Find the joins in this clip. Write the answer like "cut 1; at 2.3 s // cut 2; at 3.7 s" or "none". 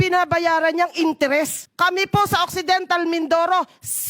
cut 1; at 1.6 s